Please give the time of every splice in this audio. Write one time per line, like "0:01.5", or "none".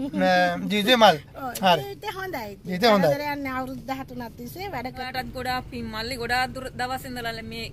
0:05.1

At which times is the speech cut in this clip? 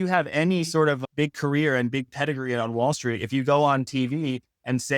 0:01.0

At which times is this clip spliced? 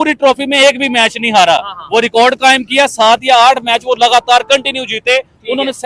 none

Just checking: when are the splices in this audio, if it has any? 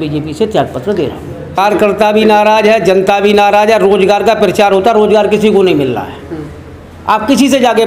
0:01.6

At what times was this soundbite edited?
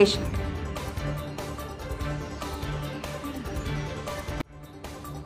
none

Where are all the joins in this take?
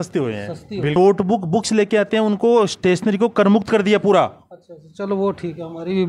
0:00.9

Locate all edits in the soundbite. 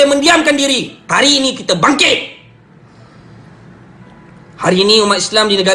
0:01.0

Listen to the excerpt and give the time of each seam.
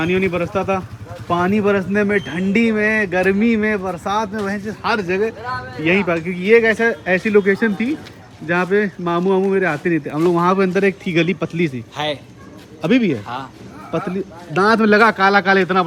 none

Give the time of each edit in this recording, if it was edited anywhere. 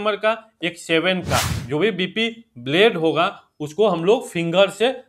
0:01.5

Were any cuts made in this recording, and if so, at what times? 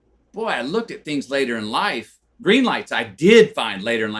0:02.3

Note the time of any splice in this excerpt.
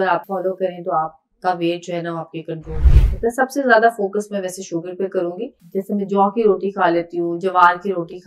0:05.6

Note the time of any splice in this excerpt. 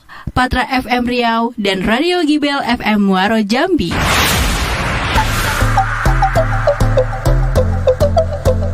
0:05.2

